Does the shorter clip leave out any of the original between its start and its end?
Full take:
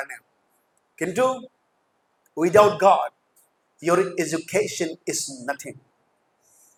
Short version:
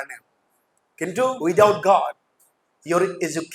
yes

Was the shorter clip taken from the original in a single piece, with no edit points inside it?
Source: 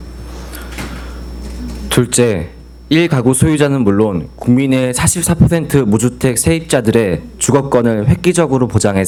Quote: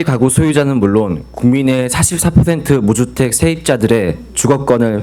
yes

